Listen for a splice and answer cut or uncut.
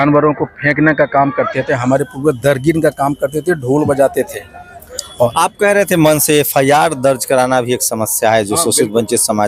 uncut